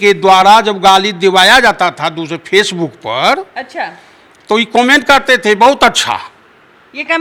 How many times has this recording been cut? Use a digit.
0